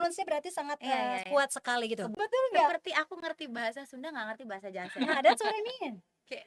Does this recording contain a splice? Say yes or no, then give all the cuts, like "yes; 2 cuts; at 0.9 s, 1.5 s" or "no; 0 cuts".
yes; 1 cut; at 2.1 s